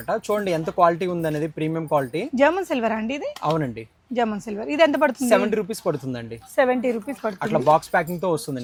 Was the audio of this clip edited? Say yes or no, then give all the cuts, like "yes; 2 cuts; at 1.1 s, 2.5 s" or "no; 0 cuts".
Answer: no; 0 cuts